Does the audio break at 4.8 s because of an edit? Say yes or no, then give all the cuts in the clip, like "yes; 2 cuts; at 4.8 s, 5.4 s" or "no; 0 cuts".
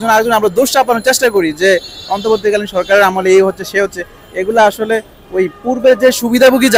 no; 0 cuts